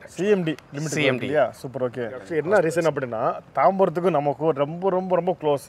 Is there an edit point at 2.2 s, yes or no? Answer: yes